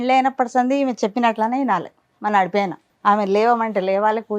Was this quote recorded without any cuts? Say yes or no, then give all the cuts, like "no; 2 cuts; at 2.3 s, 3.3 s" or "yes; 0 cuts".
no; 1 cut; at 2.8 s